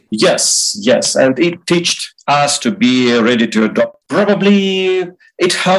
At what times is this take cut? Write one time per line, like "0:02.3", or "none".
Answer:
0:04.0